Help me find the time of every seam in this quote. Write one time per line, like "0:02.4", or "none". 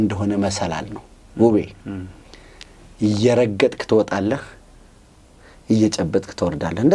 none